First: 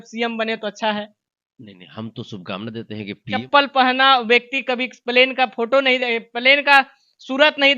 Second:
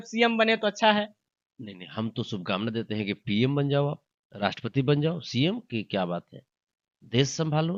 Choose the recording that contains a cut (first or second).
first